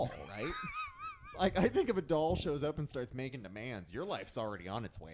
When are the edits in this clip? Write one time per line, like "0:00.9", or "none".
none